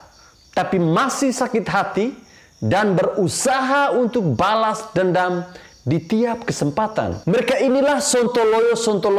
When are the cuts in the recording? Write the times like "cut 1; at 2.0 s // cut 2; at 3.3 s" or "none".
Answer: cut 1; at 7.2 s